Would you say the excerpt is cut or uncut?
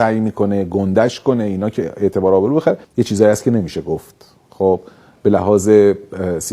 cut